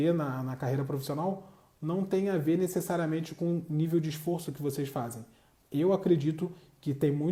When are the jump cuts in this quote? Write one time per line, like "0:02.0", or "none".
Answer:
none